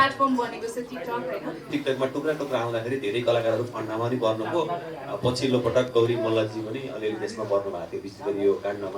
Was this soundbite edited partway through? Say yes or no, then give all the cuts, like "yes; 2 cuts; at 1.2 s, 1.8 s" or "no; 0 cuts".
yes; 1 cut; at 1.7 s